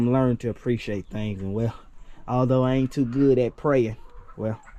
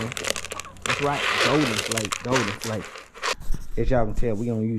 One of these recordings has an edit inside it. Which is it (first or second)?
second